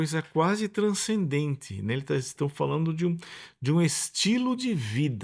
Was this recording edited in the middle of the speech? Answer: no; 0 cuts

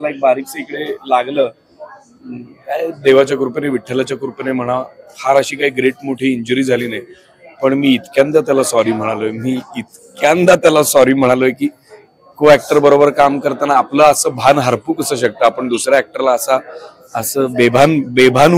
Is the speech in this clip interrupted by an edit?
no; 0 cuts

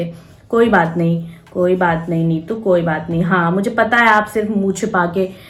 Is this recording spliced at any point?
no; 0 cuts

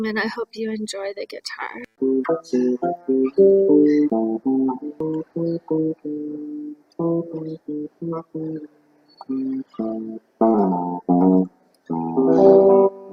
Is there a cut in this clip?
no; 0 cuts

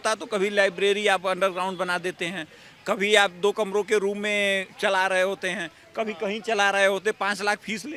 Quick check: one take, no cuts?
yes; 0 cuts

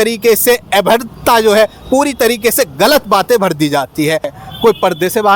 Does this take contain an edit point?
yes; 1 cut; at 4.3 s

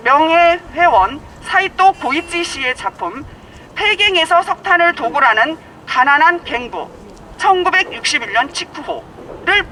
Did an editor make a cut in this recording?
no; 0 cuts

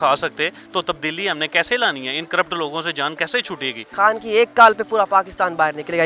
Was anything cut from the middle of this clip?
yes; 1 cut; at 3.8 s

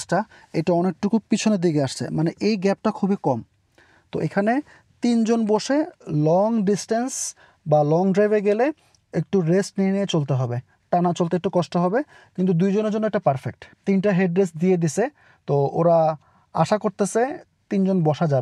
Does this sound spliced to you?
no; 0 cuts

